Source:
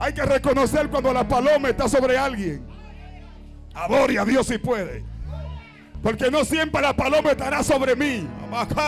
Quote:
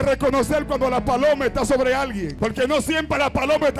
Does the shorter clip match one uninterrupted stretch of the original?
no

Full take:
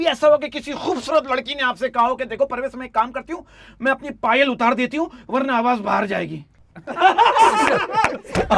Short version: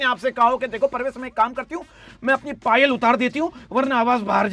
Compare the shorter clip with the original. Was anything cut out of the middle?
no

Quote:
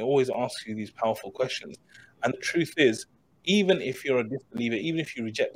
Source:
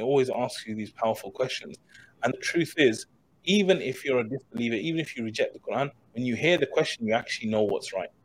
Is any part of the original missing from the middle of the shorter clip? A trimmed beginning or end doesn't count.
no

